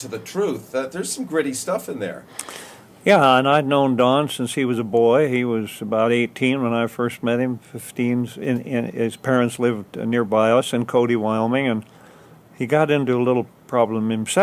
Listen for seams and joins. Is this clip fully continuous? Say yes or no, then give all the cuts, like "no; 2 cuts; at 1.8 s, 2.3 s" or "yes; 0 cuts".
no; 1 cut; at 8.0 s